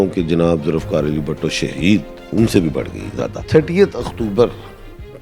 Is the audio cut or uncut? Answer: cut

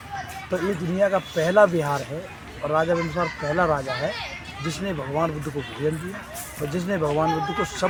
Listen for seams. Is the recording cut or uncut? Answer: uncut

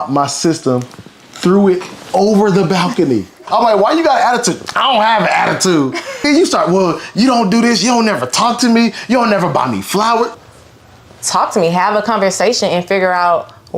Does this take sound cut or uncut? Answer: cut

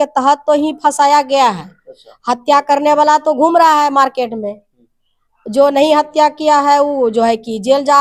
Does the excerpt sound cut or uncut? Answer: uncut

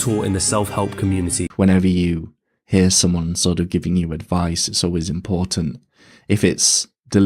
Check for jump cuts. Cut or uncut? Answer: cut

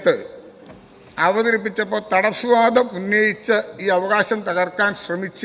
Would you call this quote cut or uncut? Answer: uncut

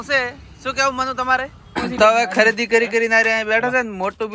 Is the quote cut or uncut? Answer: cut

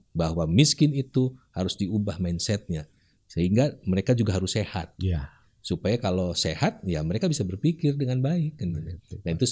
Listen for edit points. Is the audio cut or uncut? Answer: uncut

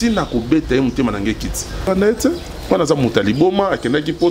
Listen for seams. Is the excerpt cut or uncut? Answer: cut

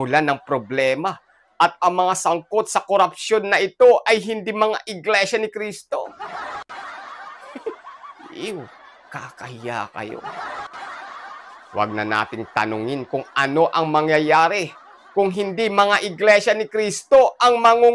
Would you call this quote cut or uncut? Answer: cut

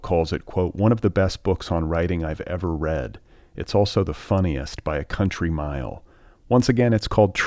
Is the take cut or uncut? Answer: uncut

